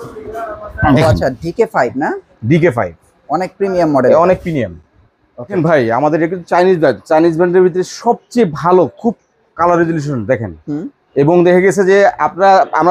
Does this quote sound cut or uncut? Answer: uncut